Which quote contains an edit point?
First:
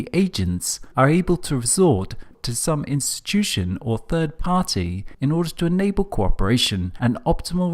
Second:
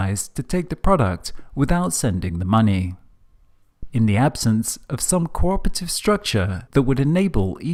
first; 1 cut; at 6.6 s

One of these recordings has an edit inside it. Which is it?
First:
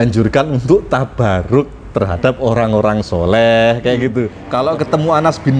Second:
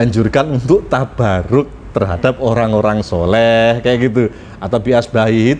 first; 1 cut; at 4.4 s

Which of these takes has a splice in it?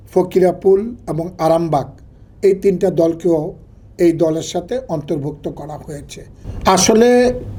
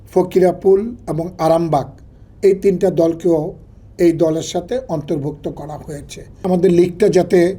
second; 1 cut; at 6.4 s

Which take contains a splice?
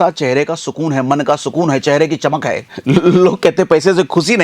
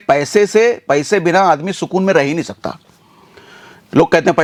first; 1 cut; at 2.7 s

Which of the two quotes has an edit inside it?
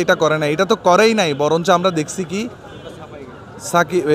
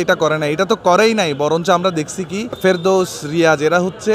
second; 1 cut; at 2.6 s

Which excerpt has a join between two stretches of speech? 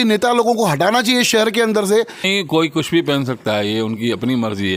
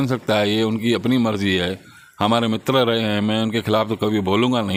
first; 1 cut; at 2.3 s

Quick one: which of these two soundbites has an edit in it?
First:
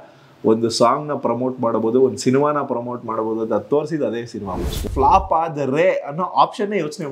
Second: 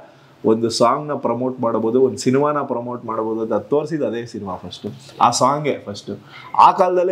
first; 1 cut; at 4.9 s

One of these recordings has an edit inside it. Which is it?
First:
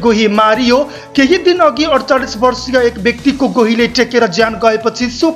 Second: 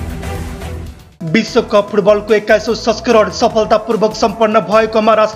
second; 1 cut; at 1.0 s

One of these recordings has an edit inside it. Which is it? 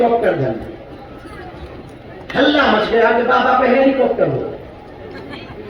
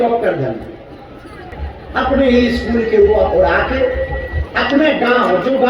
second; 1 cut; at 1.6 s

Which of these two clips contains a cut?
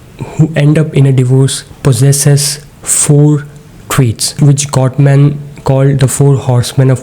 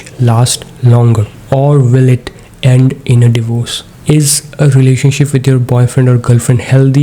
first; 1 cut; at 1.7 s

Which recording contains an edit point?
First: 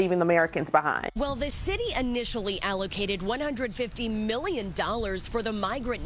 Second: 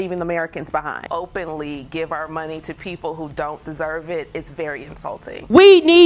first; 1 cut; at 1.0 s

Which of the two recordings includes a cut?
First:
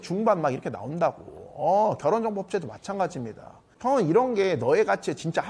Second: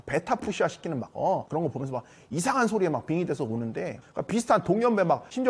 second; 1 cut; at 4.0 s

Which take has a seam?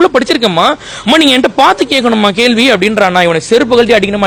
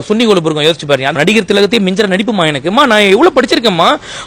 second; 1 cut; at 1.2 s

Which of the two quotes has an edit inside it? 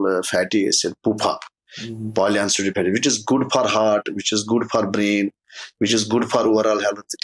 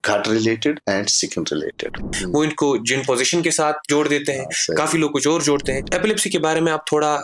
second; 2 cuts; at 2.2 s, 5.8 s

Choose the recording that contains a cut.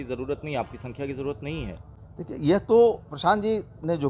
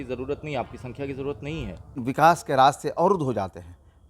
second; 1 cut; at 2.0 s

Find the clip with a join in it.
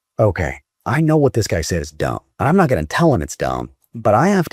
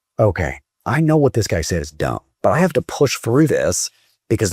second; 1 cut; at 2.2 s

